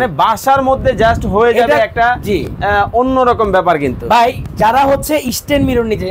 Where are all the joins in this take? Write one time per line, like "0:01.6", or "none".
none